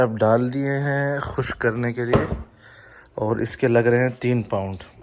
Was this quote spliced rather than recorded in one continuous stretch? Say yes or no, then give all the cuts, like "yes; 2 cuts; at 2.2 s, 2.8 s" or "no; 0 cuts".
no; 0 cuts